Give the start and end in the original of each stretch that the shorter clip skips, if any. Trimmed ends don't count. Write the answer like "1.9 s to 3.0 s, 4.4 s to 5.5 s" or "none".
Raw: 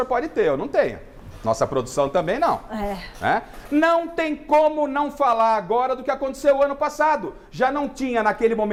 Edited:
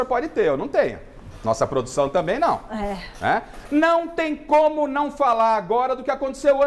none